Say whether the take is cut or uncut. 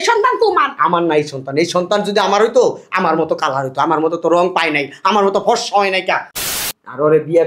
cut